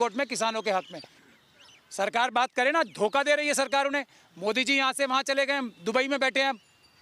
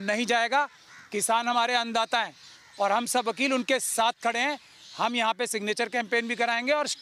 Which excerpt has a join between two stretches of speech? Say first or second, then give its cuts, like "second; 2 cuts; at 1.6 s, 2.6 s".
first; 1 cut; at 1.2 s